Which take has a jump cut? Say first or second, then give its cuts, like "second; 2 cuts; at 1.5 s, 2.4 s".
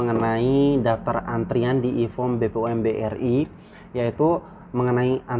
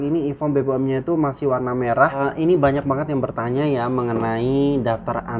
second; 1 cut; at 2.2 s